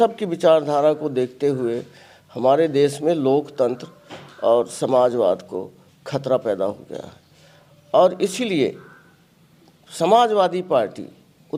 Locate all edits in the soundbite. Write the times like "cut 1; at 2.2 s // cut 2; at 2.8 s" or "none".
none